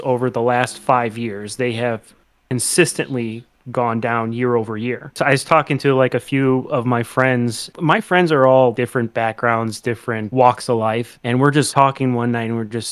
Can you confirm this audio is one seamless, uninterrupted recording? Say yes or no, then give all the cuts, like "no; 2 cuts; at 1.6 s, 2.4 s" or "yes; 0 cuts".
no; 5 cuts; at 5.1 s, 7.7 s, 8.7 s, 10.3 s, 11.6 s